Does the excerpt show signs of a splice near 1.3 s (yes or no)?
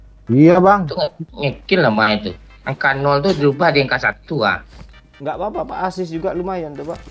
no